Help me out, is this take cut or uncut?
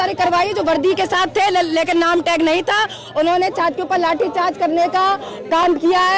uncut